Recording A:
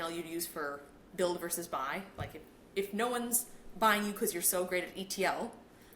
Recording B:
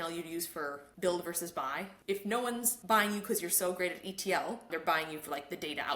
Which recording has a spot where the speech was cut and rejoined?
B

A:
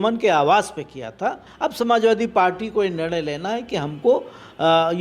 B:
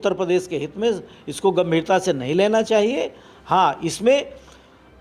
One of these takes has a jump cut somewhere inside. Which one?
A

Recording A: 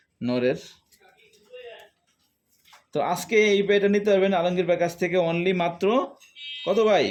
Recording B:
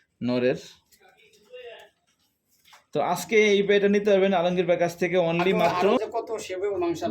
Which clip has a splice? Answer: B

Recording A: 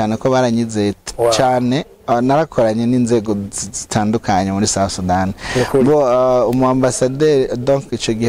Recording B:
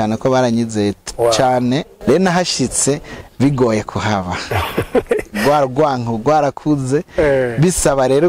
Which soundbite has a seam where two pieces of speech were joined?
B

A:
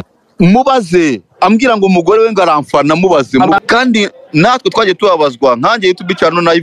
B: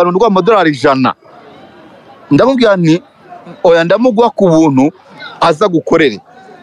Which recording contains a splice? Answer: A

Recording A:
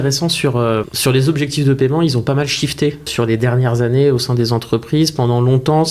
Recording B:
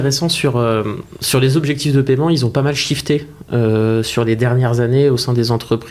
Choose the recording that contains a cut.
A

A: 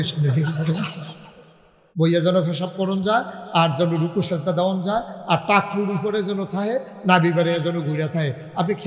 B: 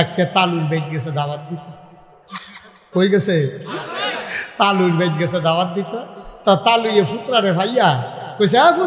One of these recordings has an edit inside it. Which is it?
A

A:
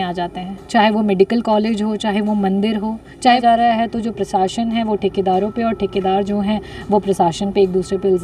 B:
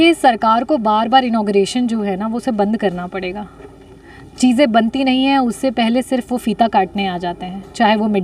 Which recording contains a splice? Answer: A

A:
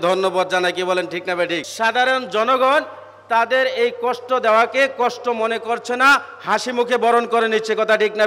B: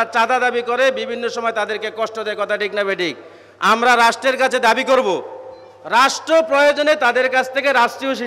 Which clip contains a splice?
A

